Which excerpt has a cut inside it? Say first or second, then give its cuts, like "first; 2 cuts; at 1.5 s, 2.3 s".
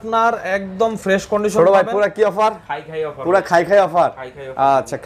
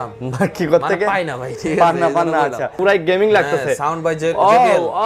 second; 1 cut; at 2.7 s